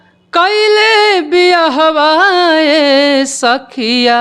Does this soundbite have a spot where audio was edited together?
no; 0 cuts

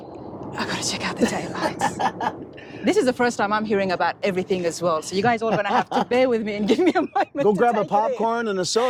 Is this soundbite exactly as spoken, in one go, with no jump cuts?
yes; 0 cuts

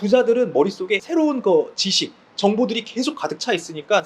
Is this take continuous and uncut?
no; 1 cut; at 1.0 s

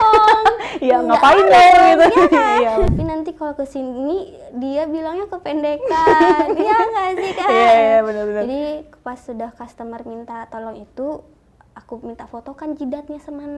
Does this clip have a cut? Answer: yes; 1 cut; at 2.9 s

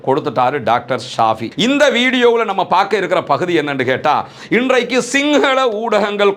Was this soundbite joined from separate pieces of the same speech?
yes; 1 cut; at 1.5 s

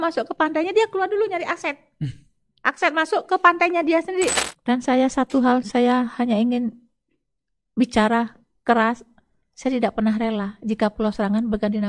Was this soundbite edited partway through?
yes; 1 cut; at 4.4 s

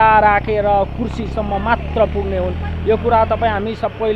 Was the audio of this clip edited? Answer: no; 0 cuts

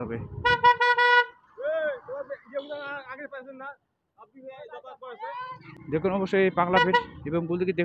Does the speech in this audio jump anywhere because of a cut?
yes; 1 cut; at 5.7 s

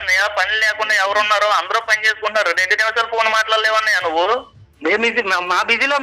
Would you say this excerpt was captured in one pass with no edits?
yes; 0 cuts

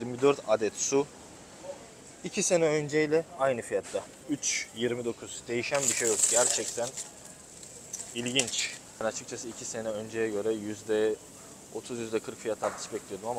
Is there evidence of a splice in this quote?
no; 0 cuts

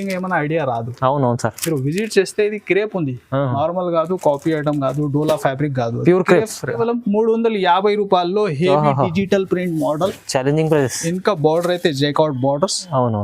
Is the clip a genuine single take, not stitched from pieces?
no; 1 cut; at 6.8 s

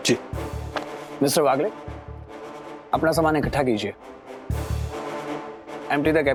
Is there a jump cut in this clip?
no; 0 cuts

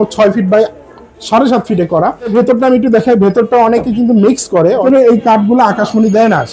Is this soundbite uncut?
no; 2 cuts; at 2.3 s, 4.8 s

